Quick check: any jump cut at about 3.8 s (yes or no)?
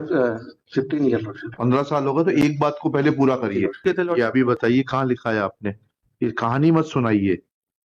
yes